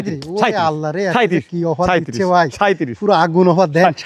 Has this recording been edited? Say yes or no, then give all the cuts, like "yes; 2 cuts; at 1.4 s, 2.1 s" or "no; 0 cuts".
no; 0 cuts